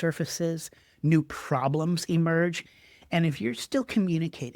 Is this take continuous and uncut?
no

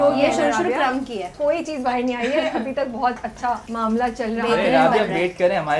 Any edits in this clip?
yes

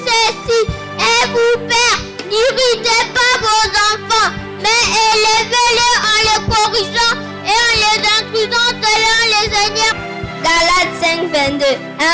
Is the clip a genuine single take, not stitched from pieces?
no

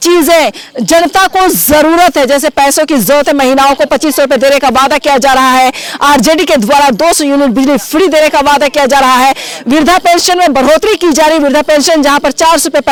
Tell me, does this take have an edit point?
no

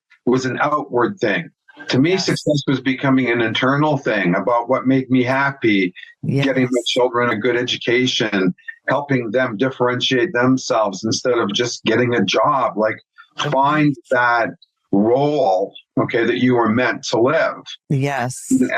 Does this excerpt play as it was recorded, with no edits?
no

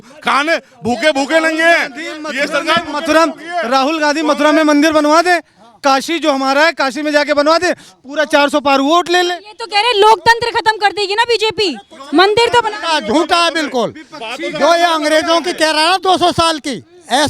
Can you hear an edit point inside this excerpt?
no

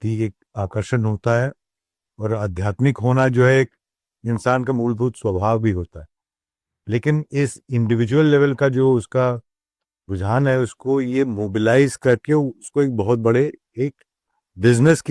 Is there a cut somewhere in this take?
no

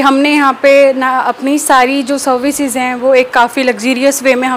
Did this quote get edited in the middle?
no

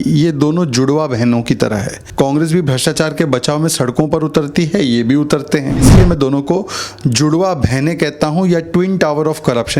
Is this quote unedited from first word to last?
no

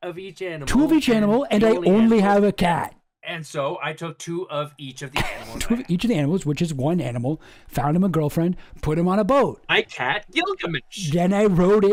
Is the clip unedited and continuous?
yes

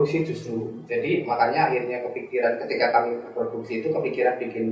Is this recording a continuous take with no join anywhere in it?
yes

